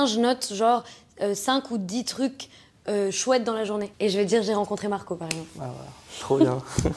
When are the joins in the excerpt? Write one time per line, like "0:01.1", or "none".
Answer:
0:03.9